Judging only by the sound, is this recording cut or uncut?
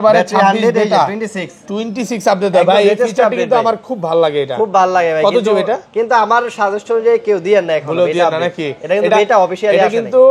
uncut